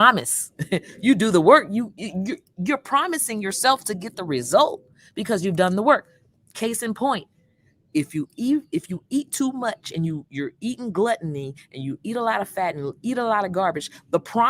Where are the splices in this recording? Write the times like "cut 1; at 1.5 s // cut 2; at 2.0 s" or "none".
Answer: none